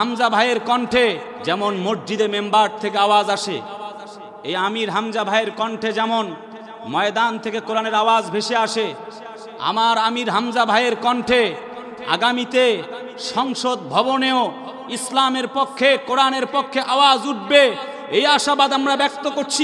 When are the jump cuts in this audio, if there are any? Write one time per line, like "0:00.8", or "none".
0:01.3